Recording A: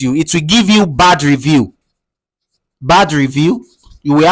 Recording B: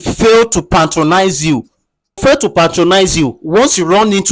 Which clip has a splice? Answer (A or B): B